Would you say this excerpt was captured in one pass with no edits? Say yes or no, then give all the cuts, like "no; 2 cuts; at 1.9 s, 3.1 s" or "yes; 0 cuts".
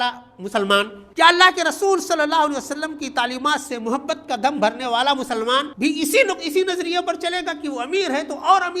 no; 2 cuts; at 1.0 s, 5.7 s